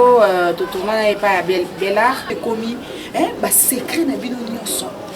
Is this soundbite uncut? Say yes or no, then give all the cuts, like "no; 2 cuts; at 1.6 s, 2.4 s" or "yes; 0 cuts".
no; 1 cut; at 2.3 s